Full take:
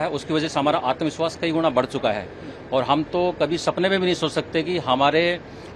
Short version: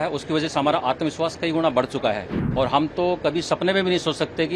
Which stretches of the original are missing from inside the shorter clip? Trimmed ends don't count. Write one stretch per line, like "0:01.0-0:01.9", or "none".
0:02.4-0:02.5